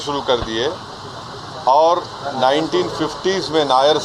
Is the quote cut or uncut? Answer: uncut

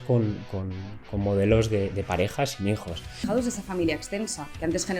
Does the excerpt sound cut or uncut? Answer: cut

